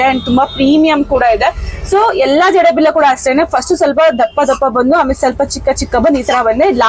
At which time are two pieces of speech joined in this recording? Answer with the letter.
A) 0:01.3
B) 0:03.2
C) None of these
C